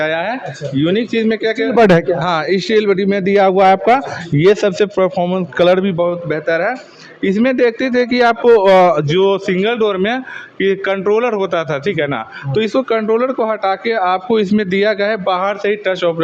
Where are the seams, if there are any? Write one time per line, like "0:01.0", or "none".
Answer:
none

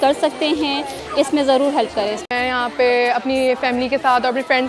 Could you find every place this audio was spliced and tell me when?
0:02.3

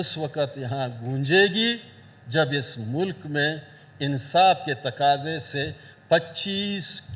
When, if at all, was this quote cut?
none

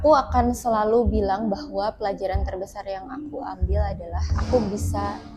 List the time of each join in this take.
0:04.3

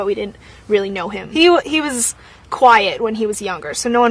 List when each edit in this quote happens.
0:01.2

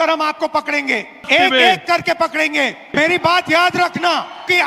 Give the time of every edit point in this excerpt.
none

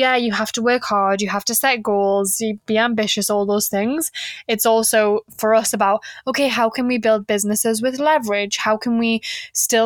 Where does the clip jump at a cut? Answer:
none

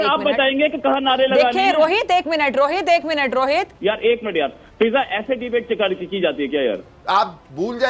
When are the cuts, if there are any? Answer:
0:03.7
0:06.9

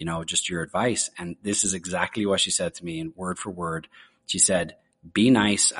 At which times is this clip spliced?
none

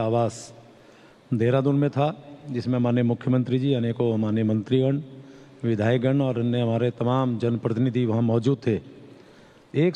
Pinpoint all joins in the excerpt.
0:01.5

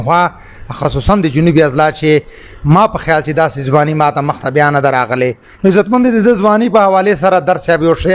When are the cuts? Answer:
0:05.4

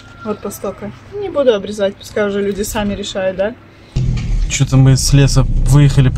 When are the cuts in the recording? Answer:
0:04.1

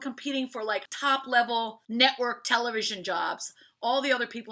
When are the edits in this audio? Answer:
0:00.9
0:01.8

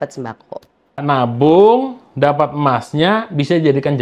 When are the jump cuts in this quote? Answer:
0:01.0

